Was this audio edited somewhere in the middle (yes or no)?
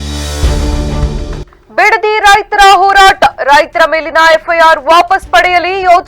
yes